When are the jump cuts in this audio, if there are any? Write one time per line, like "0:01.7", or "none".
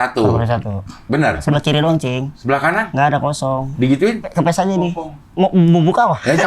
0:01.4
0:02.7
0:04.3